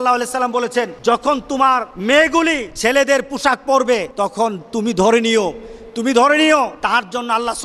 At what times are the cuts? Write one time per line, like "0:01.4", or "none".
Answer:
0:00.9
0:01.9
0:02.7
0:04.1
0:06.8